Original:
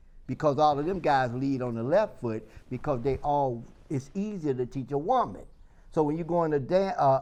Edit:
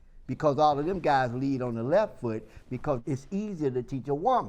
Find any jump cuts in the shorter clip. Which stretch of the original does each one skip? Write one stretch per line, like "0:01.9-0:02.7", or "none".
0:03.0-0:03.8